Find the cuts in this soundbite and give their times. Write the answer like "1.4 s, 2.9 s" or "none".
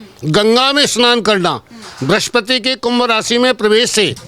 none